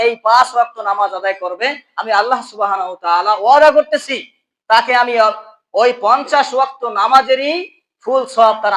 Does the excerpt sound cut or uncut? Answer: uncut